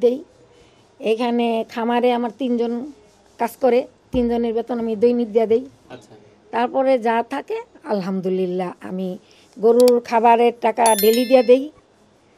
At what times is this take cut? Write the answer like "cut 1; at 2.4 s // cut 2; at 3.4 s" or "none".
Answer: none